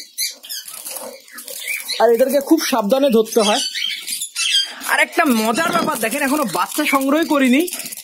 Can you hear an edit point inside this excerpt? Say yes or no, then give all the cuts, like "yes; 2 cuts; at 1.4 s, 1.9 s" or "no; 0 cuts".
no; 0 cuts